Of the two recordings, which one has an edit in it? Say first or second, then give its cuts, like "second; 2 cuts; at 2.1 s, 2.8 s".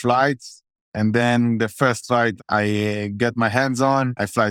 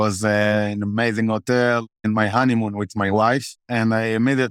second; 2 cuts; at 2.0 s, 3.6 s